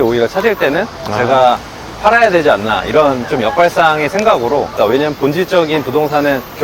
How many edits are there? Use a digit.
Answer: 1